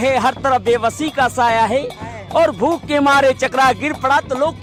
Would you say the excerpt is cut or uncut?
uncut